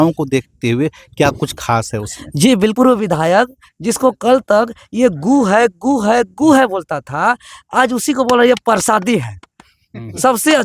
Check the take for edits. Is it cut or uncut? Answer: cut